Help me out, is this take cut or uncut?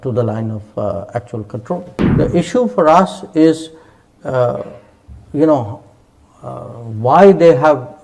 cut